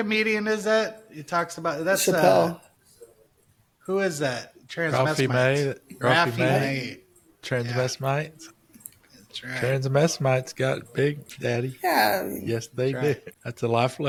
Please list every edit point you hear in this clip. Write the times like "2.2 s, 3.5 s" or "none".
none